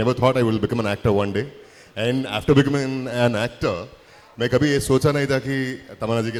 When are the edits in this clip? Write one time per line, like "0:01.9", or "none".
none